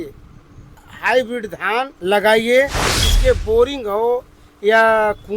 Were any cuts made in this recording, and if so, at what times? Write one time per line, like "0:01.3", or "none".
0:00.9
0:01.9
0:03.0